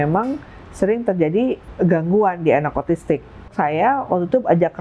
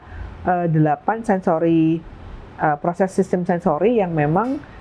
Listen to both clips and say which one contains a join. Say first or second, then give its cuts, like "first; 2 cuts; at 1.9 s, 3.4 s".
first; 2 cuts; at 1.7 s, 3.5 s